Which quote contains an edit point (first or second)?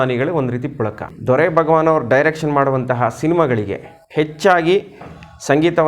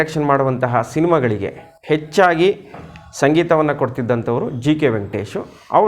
first